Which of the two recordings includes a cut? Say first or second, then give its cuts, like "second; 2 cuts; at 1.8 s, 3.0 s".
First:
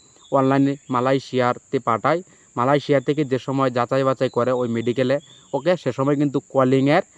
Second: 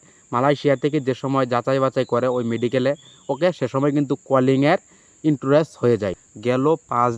second; 1 cut; at 6.2 s